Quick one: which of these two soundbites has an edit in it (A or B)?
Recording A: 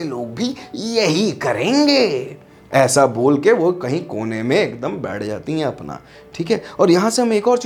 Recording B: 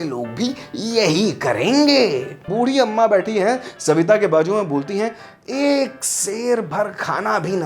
B